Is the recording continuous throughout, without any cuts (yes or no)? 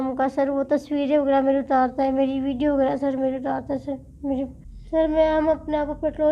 no